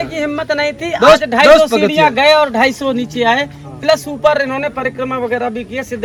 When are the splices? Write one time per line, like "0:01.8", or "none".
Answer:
none